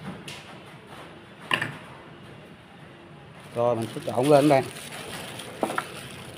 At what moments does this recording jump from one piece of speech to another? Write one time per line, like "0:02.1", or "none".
none